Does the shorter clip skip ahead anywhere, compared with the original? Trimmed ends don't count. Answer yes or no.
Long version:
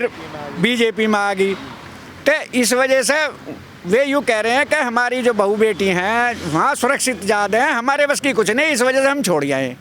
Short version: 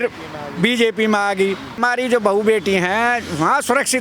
yes